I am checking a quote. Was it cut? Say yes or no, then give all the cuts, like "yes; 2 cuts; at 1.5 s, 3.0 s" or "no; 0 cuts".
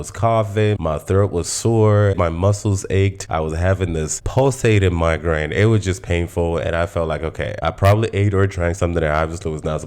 yes; 3 cuts; at 2.1 s, 3.2 s, 7.6 s